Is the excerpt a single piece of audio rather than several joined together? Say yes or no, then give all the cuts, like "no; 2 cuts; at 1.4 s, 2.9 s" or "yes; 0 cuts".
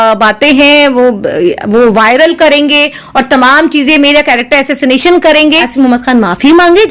no; 1 cut; at 5.5 s